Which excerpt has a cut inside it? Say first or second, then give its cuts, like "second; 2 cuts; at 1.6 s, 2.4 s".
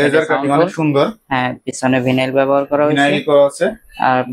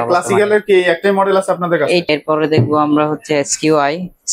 second; 1 cut; at 2.1 s